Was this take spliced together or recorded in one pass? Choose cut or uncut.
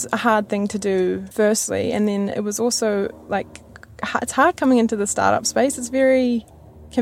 uncut